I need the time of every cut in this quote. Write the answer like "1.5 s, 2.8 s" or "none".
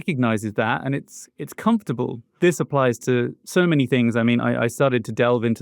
none